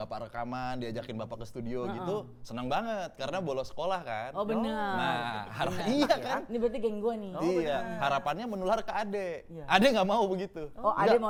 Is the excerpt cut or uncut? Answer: uncut